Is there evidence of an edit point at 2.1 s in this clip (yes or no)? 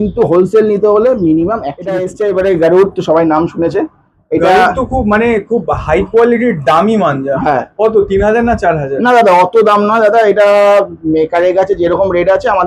yes